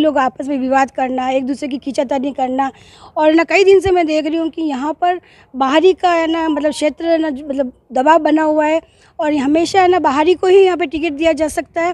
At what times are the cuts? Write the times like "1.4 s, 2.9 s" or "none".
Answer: none